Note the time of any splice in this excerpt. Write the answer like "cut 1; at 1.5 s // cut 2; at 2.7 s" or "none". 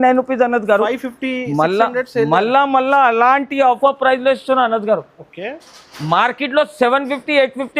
cut 1; at 3.8 s